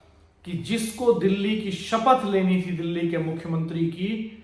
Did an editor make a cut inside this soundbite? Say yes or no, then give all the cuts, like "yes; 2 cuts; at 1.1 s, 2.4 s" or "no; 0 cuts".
no; 0 cuts